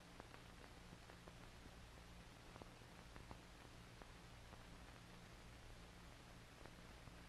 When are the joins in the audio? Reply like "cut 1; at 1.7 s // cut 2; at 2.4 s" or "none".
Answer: none